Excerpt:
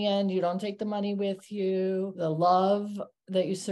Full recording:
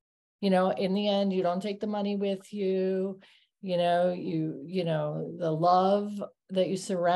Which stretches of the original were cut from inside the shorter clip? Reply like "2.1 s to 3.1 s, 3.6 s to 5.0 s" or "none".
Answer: 3.1 s to 5.3 s